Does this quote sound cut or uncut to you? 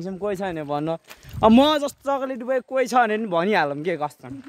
uncut